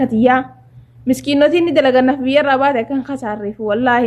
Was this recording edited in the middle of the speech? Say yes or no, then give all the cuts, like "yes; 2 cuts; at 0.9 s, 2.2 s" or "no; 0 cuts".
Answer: no; 0 cuts